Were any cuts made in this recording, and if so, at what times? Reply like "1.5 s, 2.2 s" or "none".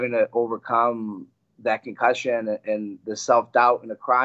none